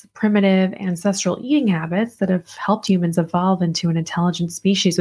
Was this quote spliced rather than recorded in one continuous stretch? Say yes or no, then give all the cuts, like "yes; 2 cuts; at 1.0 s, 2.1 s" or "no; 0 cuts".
no; 0 cuts